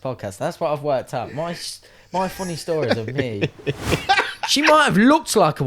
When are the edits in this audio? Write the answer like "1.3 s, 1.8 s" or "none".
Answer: 3.9 s